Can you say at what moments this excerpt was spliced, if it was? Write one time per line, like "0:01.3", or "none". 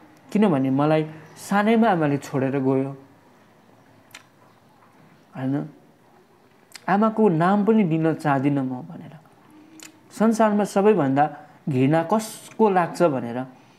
none